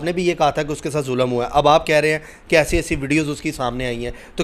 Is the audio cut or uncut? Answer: uncut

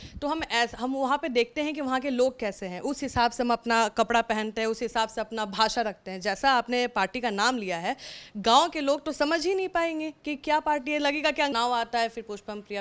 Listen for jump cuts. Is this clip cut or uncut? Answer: cut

